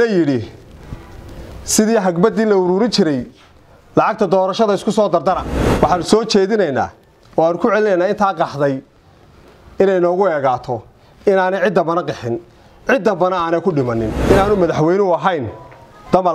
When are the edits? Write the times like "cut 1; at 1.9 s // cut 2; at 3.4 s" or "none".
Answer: cut 1; at 5.5 s // cut 2; at 14.2 s